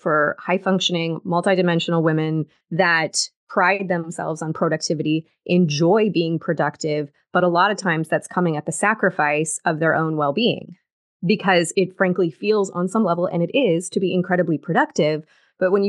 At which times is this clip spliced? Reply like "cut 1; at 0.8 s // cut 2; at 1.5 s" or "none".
cut 1; at 2.6 s